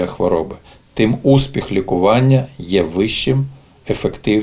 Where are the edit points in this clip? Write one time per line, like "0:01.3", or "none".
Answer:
none

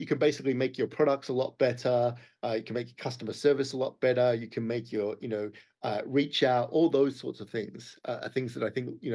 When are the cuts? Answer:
none

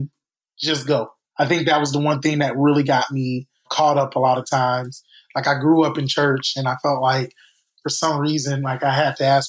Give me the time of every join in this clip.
0:01.2

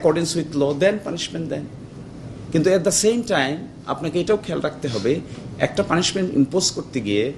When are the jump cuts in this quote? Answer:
none

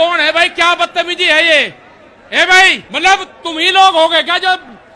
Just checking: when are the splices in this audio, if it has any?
0:02.8

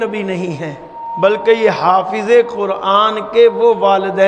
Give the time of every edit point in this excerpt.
0:01.0

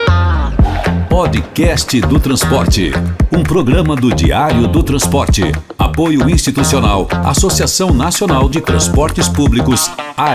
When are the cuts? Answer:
none

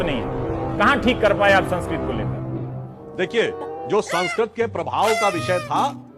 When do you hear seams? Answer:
none

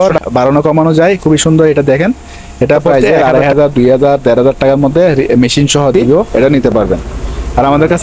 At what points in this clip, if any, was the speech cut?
0:02.9
0:06.3

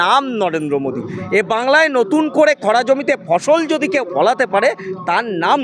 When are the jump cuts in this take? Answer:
none

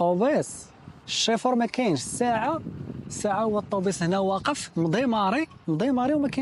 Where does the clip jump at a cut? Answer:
none

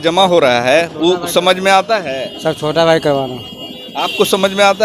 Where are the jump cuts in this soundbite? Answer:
none

